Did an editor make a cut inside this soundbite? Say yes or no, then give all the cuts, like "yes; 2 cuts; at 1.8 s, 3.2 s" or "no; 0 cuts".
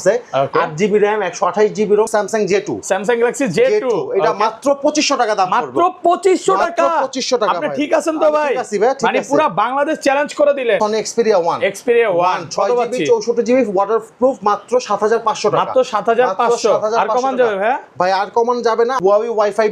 yes; 3 cuts; at 2.1 s, 10.8 s, 19.0 s